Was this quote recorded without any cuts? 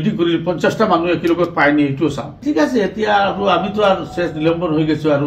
no; 1 cut; at 2.3 s

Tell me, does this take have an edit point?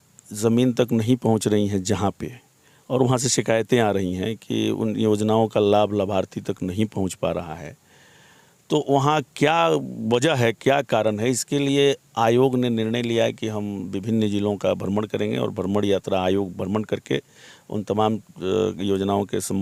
no; 0 cuts

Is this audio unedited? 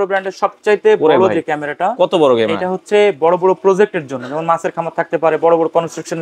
yes; 0 cuts

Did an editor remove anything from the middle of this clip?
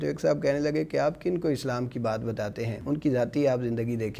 yes; 1 cut; at 2.8 s

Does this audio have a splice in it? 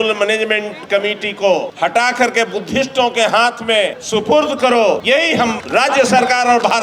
yes; 3 cuts; at 1.7 s, 4.0 s, 5.3 s

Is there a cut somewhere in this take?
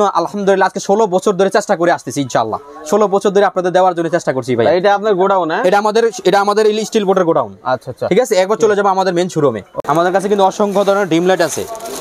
no; 0 cuts

